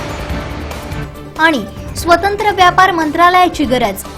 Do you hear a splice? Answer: yes; 1 cut; at 1.0 s

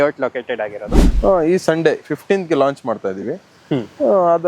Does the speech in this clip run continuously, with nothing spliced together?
no; 1 cut; at 1.0 s

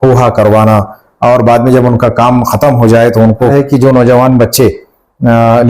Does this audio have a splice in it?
yes; 1 cut; at 3.5 s

